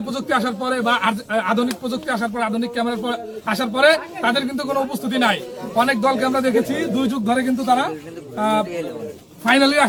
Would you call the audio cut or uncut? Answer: uncut